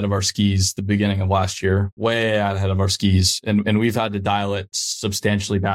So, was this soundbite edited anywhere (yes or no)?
no